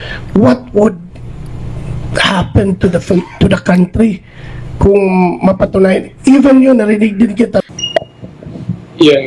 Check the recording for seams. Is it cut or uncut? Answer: cut